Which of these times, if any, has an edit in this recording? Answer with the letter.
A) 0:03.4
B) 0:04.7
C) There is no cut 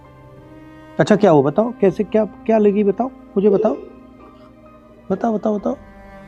C